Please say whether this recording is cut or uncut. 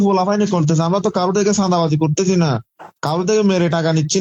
uncut